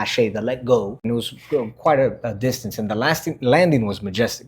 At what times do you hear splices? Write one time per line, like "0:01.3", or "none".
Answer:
0:01.1

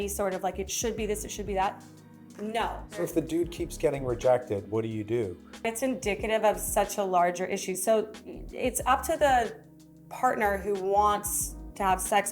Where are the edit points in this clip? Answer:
0:03.0
0:05.6

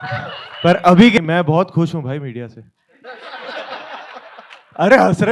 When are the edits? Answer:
0:01.2

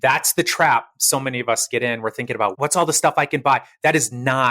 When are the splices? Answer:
0:02.5

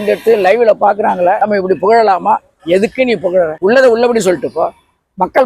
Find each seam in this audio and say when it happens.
0:01.4
0:03.5

